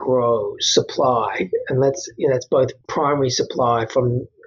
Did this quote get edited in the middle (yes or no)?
yes